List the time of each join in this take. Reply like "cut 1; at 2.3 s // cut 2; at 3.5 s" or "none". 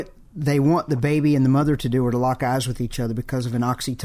none